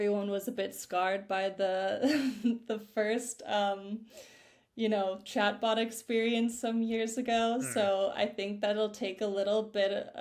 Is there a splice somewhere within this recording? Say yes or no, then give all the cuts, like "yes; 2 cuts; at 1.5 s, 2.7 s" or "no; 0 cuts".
no; 0 cuts